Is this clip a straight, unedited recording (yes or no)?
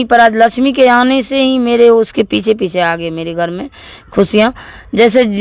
yes